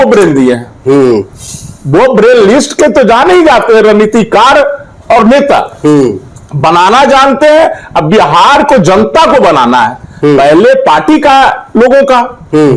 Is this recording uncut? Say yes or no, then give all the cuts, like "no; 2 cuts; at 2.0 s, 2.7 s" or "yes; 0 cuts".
yes; 0 cuts